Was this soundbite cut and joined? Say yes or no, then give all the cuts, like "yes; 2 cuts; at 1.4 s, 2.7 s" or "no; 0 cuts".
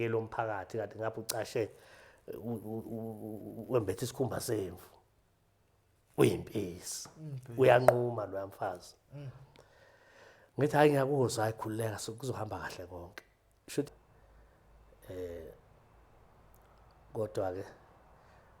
yes; 1 cut; at 13.9 s